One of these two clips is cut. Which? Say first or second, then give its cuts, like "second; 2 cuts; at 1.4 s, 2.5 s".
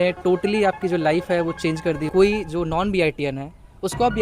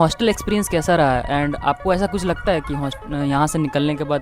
first; 1 cut; at 2.0 s